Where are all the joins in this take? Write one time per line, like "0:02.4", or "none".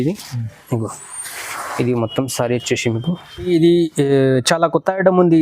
0:03.5